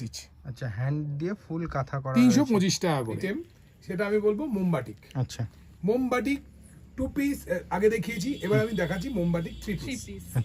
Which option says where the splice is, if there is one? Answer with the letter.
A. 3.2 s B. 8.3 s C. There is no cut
A